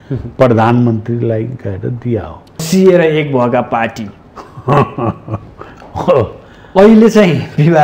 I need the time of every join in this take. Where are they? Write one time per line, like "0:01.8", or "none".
0:02.6